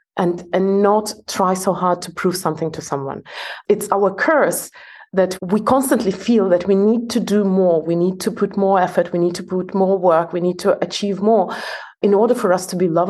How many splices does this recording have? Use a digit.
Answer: 3